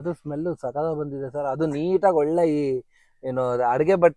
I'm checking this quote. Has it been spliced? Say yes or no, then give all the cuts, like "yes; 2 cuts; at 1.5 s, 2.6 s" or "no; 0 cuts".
no; 0 cuts